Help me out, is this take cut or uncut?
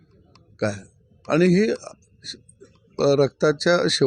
uncut